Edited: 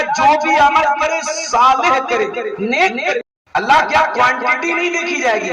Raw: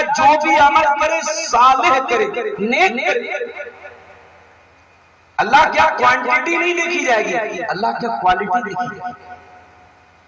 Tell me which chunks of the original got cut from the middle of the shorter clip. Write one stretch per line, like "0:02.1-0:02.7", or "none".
0:03.3-0:05.1